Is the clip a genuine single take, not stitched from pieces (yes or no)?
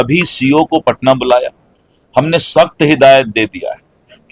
yes